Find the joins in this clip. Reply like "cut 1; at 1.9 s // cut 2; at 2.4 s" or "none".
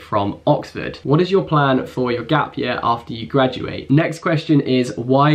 cut 1; at 1.0 s // cut 2; at 3.8 s

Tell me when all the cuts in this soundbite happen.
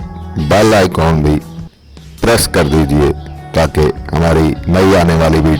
none

